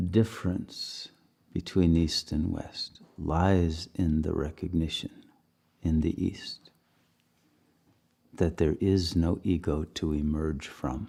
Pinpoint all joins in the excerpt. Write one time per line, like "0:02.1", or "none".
none